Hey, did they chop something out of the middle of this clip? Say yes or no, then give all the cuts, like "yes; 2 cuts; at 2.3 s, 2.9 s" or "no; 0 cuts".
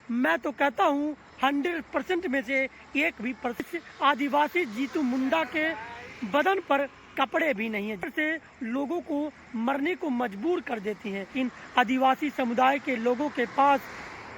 yes; 3 cuts; at 3.6 s, 8.0 s, 11.3 s